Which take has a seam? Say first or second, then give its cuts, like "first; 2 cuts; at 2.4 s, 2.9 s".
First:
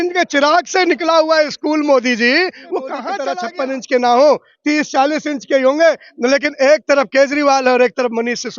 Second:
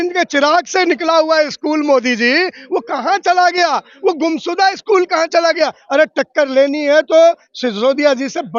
first; 1 cut; at 3.1 s